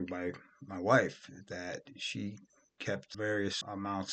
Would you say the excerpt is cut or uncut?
uncut